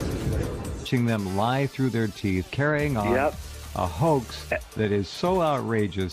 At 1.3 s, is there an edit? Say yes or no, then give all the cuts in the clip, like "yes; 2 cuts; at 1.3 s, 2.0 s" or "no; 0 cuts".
yes; 1 cut; at 1.3 s